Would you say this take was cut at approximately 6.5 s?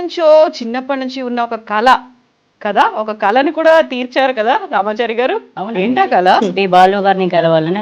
yes; 1 cut; at 6.5 s

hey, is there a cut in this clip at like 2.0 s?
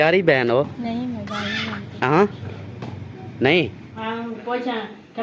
no; 1 cut; at 3.9 s

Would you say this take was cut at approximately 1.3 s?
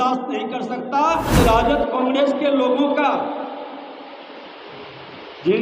yes; 1 cut; at 1.3 s

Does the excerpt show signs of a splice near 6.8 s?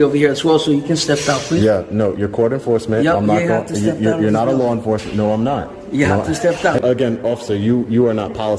yes; 1 cut; at 6.8 s

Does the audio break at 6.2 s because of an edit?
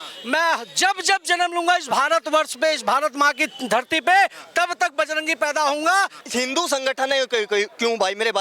yes; 1 cut; at 6.2 s

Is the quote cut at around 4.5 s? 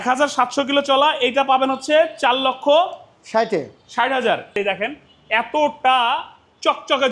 yes; 1 cut; at 4.5 s

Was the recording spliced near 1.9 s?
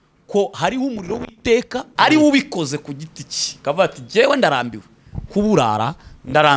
yes; 1 cut; at 1.9 s

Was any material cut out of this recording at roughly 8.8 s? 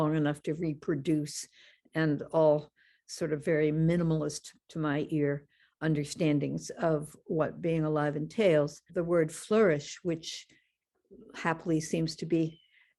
yes; 1 cut; at 8.8 s

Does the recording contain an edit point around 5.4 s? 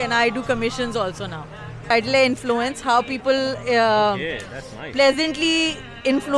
no; 1 cut; at 1.9 s

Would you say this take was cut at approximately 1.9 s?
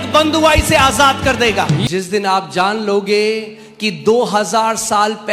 yes; 1 cut; at 1.9 s

